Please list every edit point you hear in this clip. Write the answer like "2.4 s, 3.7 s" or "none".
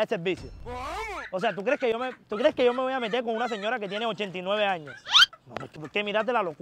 none